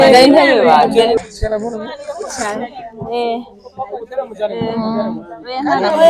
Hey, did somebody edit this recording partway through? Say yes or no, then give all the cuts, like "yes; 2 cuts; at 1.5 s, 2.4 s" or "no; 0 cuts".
yes; 1 cut; at 1.2 s